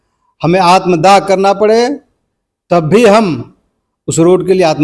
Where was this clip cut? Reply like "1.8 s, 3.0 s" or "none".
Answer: none